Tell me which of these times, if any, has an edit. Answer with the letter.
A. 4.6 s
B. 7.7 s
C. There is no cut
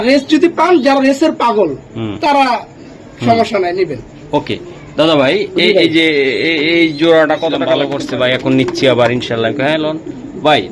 B